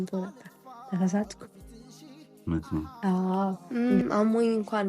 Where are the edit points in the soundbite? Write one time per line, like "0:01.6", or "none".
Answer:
0:03.6